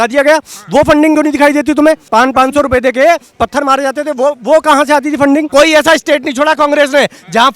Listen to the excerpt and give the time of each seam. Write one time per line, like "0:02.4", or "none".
0:02.0
0:05.5